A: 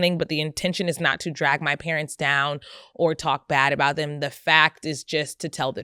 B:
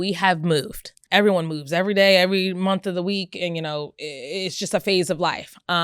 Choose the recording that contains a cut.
B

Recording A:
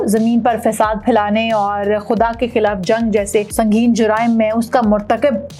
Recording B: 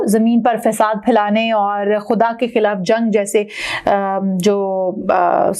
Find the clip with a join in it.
A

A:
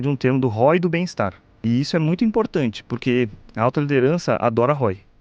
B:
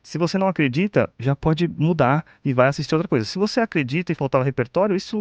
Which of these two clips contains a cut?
A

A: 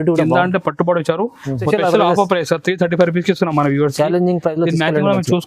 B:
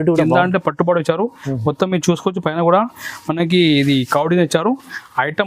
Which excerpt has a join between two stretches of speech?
A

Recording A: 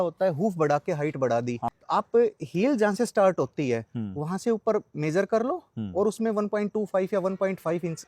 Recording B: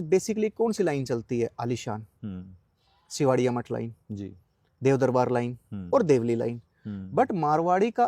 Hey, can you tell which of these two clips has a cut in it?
A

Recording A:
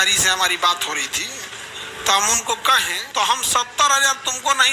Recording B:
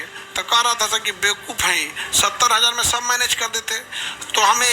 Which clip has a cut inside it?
A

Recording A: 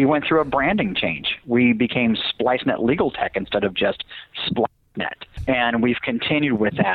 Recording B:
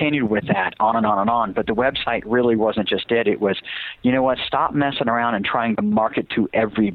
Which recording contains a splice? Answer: A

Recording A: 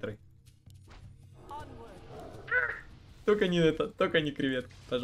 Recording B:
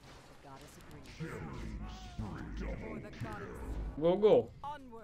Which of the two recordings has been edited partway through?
B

